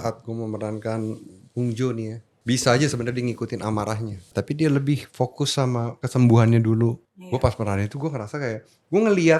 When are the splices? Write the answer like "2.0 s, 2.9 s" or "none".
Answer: 2.3 s, 4.3 s, 6.0 s, 7.1 s